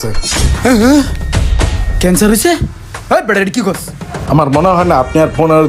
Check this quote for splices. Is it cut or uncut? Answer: uncut